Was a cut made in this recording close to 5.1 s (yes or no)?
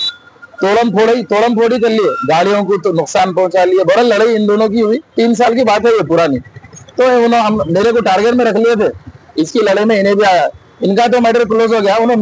yes